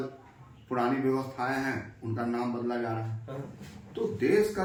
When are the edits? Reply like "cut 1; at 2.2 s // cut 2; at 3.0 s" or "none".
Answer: none